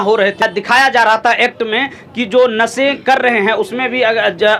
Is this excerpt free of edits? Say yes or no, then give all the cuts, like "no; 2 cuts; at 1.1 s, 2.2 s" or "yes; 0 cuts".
yes; 0 cuts